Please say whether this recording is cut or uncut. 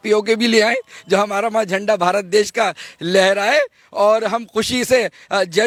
uncut